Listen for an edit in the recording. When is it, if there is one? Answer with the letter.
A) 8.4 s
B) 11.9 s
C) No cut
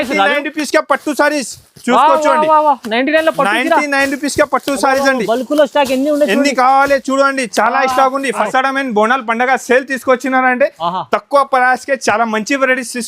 A